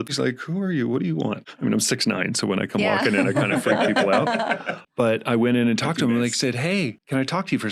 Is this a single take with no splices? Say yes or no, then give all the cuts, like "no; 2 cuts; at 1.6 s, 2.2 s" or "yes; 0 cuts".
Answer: yes; 0 cuts